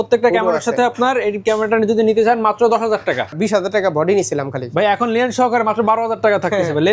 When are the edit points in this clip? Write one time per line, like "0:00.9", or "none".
0:03.3